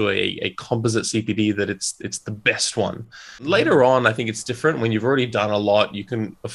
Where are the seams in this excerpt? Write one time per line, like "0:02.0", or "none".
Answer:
0:03.4